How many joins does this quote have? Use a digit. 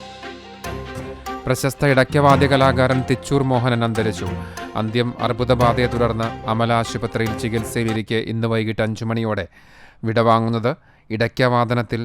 1